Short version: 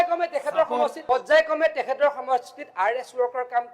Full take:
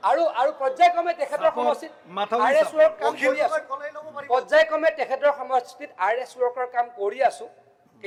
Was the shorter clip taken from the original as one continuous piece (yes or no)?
no